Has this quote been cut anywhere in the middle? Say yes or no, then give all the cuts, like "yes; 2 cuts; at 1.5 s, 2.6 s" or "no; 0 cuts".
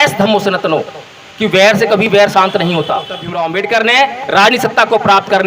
yes; 1 cut; at 3.2 s